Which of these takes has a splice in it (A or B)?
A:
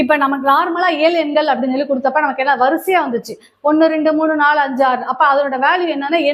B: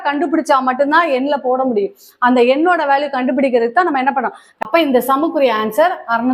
B